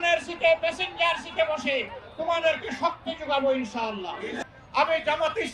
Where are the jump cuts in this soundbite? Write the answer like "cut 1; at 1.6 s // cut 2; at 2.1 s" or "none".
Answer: cut 1; at 4.4 s